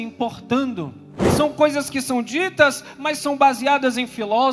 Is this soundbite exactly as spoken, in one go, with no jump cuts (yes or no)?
no